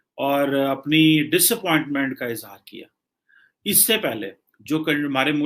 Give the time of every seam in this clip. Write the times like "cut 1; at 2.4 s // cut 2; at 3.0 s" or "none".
none